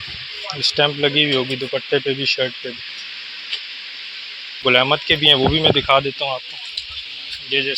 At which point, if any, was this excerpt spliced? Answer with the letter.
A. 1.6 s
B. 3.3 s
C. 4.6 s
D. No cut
C